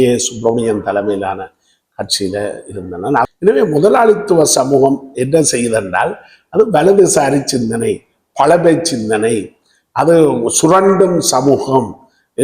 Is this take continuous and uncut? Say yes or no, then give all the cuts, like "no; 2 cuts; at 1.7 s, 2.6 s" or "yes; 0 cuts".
no; 1 cut; at 3.3 s